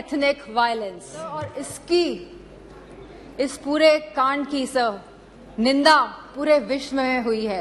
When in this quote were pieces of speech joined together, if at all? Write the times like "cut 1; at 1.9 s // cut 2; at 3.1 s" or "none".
cut 1; at 1.5 s